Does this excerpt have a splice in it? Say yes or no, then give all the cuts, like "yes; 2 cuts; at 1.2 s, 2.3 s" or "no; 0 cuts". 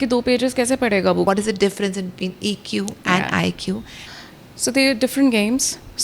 yes; 2 cuts; at 1.2 s, 4.2 s